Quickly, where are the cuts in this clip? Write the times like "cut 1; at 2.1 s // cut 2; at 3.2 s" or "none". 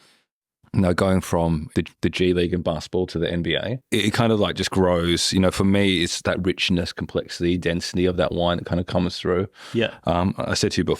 cut 1; at 1.8 s // cut 2; at 3.8 s